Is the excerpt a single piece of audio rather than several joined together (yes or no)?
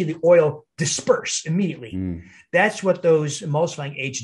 yes